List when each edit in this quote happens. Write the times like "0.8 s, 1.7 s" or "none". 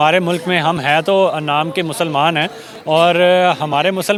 none